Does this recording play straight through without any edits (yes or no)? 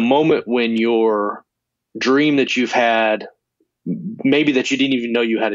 yes